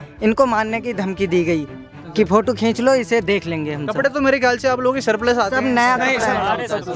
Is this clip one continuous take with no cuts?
yes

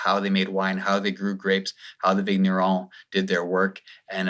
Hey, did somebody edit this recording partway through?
no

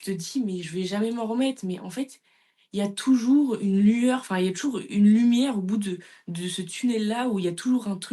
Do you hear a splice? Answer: no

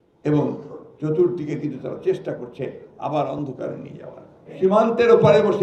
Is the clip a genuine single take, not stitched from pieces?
no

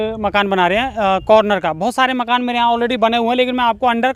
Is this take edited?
no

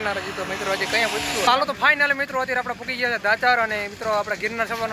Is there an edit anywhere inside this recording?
yes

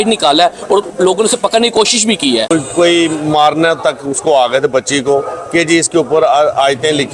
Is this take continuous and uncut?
no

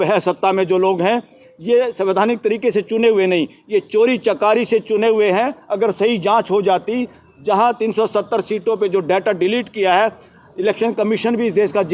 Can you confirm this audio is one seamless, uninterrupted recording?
yes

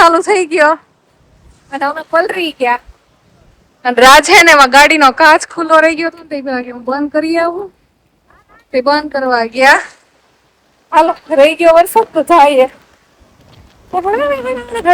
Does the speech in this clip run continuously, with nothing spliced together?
yes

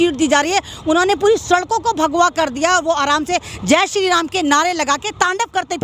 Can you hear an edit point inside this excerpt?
no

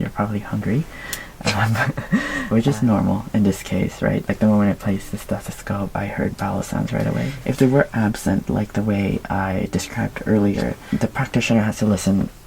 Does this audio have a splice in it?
yes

